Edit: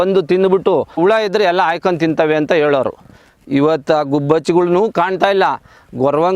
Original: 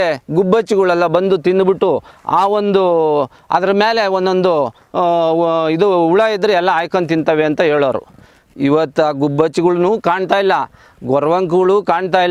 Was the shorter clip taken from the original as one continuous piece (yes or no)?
no